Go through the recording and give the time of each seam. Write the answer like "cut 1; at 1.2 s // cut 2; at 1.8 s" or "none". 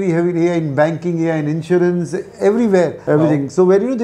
cut 1; at 3.0 s